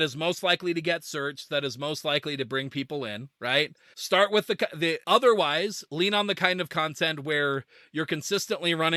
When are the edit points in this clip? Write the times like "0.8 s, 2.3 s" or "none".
3.6 s

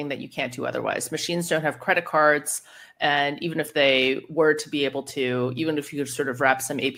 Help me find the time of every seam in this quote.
none

